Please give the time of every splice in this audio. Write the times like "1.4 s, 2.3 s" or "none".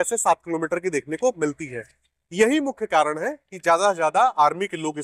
none